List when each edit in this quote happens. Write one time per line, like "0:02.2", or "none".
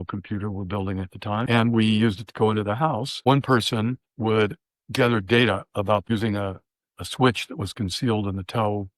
0:01.4
0:03.1
0:04.1
0:06.0